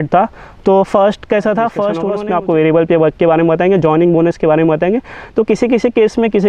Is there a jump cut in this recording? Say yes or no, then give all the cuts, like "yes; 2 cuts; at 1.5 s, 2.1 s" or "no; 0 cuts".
yes; 1 cut; at 2.1 s